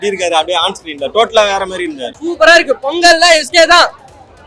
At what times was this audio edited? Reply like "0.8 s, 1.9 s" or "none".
2.1 s